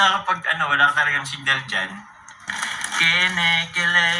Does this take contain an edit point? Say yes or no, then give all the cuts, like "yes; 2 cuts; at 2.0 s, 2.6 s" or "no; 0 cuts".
yes; 1 cut; at 2.4 s